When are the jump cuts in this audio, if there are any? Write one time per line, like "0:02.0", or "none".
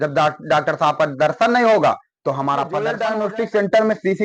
0:02.9